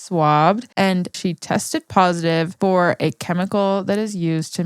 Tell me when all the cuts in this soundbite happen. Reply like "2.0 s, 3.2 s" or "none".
1.1 s